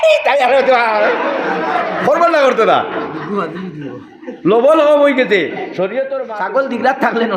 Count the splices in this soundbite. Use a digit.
1